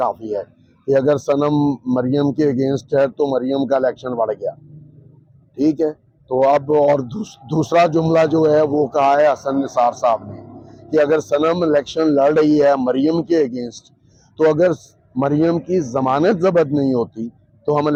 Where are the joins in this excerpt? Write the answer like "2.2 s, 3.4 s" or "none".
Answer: none